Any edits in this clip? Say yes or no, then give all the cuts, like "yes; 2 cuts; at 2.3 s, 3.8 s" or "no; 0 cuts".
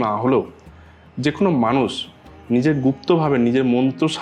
no; 0 cuts